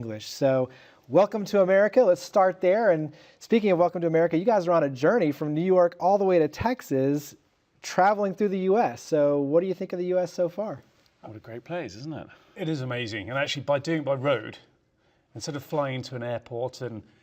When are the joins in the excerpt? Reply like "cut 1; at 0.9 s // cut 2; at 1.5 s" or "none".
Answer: cut 1; at 1.3 s